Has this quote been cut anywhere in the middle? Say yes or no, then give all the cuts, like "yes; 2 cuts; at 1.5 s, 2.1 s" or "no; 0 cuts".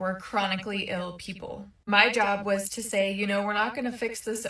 no; 0 cuts